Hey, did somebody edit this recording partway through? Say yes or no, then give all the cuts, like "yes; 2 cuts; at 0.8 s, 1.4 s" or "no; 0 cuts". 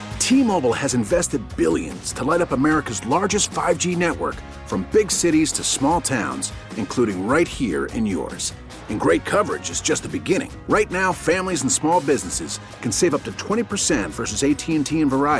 no; 0 cuts